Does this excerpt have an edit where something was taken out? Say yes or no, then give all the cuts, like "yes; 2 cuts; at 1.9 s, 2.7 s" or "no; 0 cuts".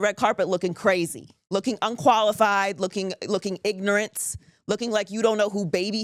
no; 0 cuts